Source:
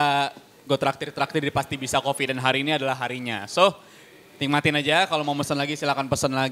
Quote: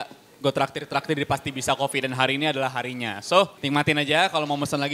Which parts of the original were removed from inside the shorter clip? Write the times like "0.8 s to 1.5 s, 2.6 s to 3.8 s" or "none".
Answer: 3.8 s to 4.3 s